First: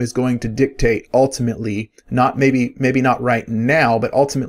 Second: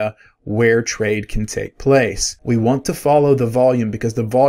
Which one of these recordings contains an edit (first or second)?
second